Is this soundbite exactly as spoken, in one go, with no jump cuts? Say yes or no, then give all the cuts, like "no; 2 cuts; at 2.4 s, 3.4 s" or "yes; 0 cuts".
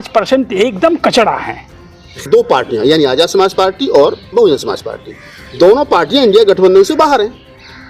no; 1 cut; at 2.2 s